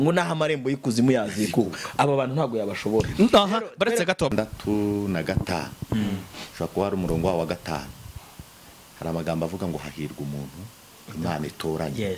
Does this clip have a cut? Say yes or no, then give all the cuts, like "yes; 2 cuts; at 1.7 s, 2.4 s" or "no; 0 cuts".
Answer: yes; 1 cut; at 4.3 s